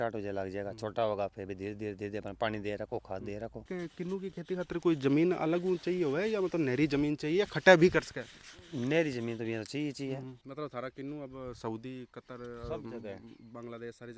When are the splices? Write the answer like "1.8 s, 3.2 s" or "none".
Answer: 3.7 s, 10.4 s